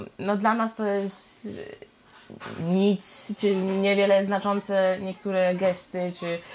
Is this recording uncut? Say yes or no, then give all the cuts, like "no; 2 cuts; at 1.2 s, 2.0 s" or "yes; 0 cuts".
yes; 0 cuts